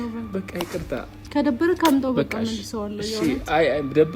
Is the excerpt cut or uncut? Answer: uncut